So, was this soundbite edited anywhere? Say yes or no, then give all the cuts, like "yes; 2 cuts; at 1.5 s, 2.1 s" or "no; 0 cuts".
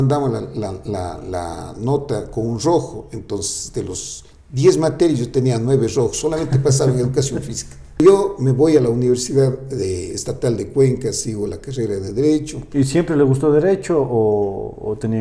yes; 1 cut; at 8.0 s